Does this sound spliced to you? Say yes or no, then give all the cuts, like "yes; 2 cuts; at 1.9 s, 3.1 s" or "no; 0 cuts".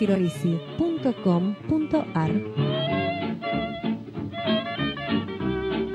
no; 0 cuts